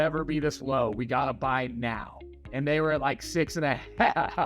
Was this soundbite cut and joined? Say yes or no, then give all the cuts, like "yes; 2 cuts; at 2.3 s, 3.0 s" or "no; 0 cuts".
no; 0 cuts